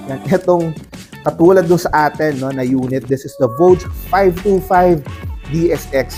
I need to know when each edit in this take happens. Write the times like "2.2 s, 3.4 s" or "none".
none